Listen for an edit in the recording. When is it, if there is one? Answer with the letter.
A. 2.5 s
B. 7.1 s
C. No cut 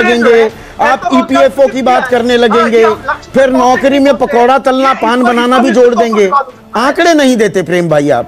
C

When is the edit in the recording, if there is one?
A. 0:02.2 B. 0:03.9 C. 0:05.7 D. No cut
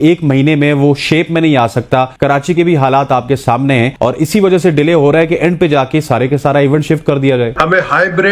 D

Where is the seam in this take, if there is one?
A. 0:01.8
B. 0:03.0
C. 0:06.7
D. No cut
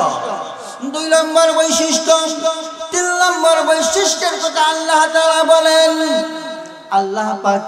C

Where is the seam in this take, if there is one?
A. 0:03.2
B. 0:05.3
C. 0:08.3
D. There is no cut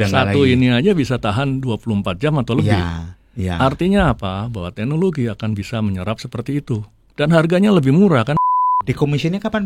C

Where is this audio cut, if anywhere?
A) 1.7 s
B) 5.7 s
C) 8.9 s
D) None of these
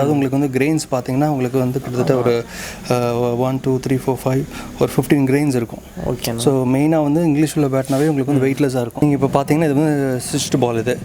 C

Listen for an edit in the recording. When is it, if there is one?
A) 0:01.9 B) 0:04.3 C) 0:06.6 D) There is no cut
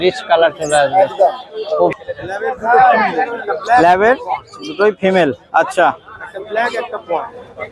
A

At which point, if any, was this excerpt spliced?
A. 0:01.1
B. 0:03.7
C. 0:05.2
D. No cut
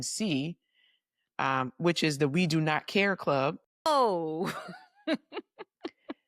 B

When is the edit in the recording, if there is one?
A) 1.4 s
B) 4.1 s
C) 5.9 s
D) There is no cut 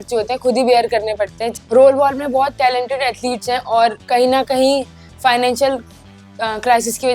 A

